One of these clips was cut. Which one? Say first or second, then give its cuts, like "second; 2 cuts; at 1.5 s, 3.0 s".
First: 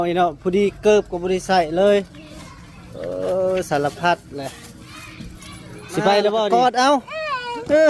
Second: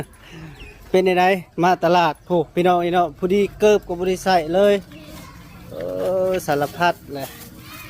first; 1 cut; at 6.5 s